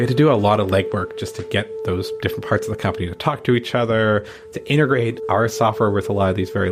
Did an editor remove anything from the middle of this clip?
no; 0 cuts

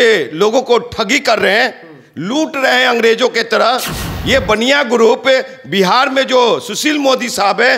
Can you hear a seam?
no; 0 cuts

